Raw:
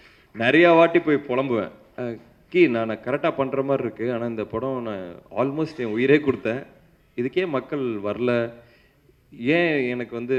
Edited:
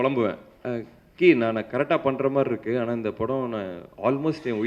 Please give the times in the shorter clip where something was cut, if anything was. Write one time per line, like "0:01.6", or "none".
none

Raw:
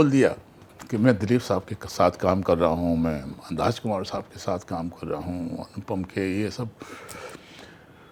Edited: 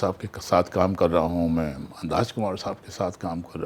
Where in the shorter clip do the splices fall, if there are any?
none

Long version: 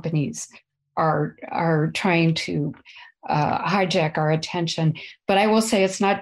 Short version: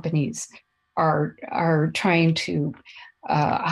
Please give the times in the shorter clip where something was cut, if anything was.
none

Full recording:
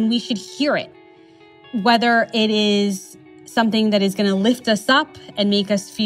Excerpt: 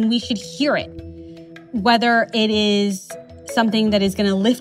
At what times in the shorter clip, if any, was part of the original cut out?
none

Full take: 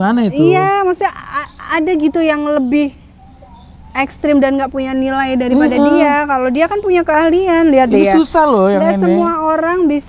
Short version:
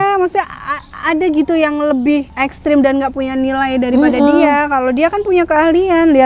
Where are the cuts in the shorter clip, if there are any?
0:02.3

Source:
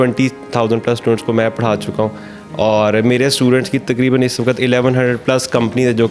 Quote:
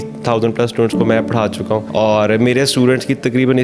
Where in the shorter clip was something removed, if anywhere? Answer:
0:01.9

